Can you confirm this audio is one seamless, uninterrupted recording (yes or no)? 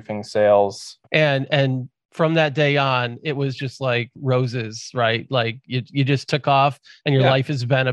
no